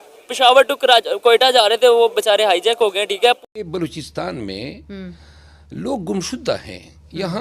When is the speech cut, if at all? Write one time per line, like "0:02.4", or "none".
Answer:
0:03.4